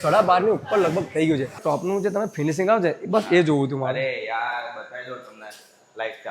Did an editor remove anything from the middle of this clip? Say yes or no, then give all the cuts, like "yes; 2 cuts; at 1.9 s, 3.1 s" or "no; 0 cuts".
yes; 1 cut; at 1.6 s